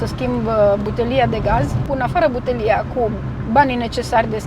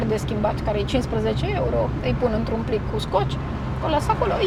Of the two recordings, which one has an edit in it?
first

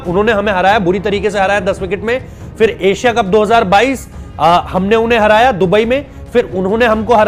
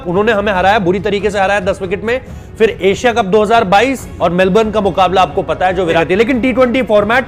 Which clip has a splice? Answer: second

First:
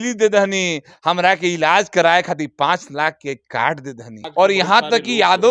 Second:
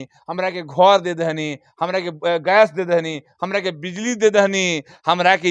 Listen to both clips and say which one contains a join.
first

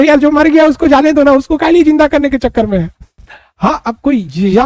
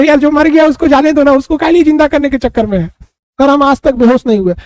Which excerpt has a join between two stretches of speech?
second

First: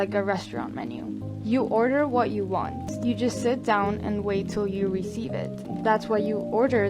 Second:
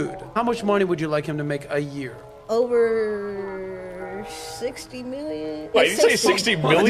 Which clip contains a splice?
first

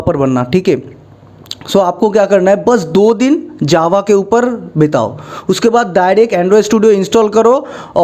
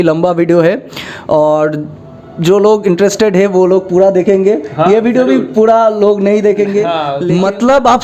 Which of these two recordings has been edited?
second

